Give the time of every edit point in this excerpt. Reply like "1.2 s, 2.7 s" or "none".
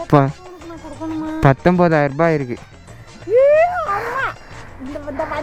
none